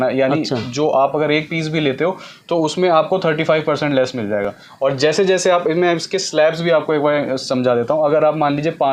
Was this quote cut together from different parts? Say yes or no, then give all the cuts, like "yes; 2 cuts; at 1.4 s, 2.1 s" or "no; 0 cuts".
no; 0 cuts